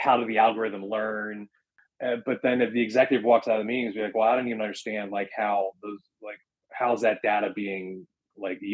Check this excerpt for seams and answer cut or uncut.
cut